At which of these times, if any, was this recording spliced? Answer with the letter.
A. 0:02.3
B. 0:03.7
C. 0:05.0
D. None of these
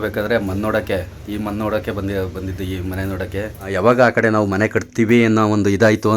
B